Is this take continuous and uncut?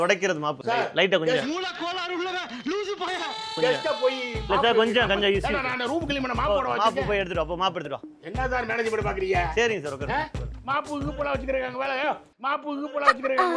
yes; 0 cuts

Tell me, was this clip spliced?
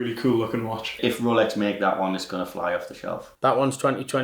yes; 2 cuts; at 0.9 s, 3.3 s

